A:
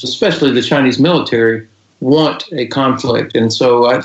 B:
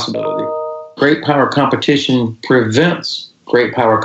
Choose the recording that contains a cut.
B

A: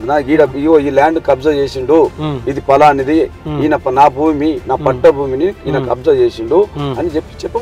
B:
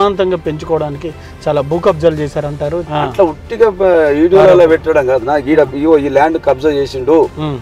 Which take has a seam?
B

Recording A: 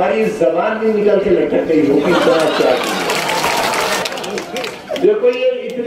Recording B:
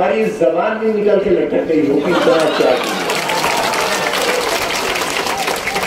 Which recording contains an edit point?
A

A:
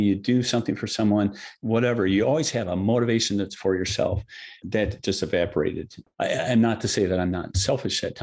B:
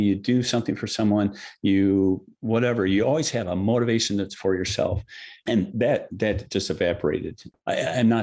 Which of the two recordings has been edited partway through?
A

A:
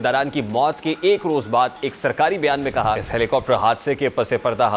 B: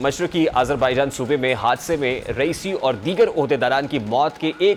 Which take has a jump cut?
A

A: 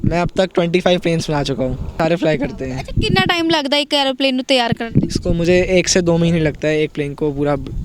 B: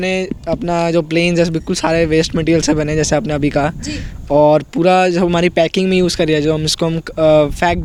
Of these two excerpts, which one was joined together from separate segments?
A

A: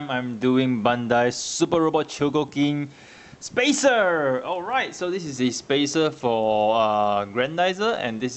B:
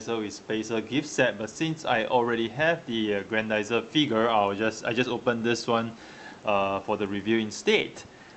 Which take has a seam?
B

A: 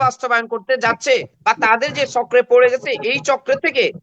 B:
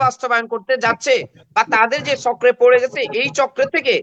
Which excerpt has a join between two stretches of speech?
A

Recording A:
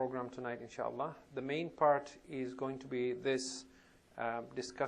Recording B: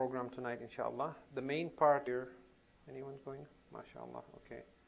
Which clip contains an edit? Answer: A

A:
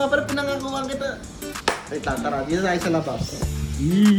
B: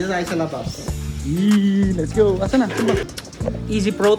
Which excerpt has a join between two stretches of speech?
B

